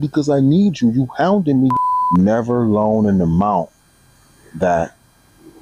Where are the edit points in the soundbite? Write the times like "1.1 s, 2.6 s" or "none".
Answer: 1.7 s